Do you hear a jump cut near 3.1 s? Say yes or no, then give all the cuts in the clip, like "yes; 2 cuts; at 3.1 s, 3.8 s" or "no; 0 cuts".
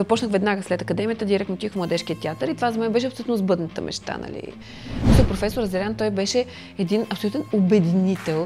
no; 1 cut; at 4.9 s